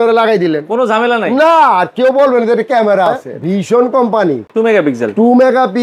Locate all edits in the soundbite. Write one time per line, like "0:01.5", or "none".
0:03.3
0:04.5